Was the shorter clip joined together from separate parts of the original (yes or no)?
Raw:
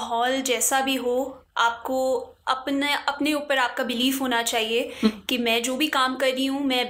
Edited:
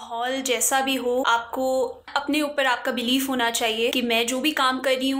yes